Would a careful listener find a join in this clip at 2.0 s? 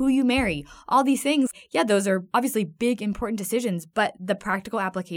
yes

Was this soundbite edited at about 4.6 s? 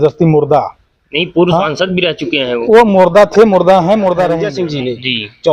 yes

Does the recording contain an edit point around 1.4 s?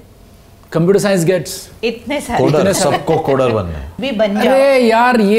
no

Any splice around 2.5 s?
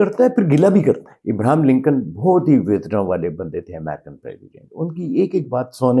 no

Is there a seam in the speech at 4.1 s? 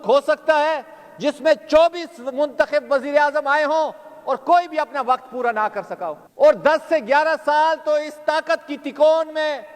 no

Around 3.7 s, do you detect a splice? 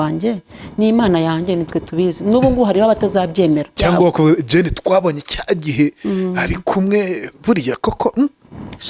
yes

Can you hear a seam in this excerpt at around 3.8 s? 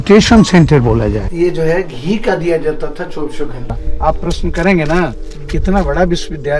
yes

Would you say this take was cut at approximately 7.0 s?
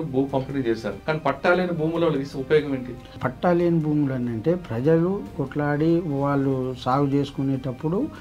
no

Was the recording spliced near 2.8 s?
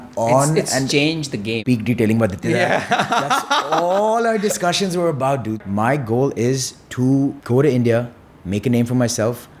no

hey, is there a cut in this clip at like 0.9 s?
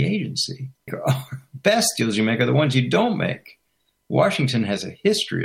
yes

